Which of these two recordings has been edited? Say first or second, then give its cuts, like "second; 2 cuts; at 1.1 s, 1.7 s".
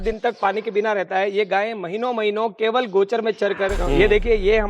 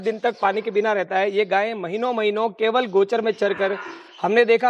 first; 1 cut; at 3.8 s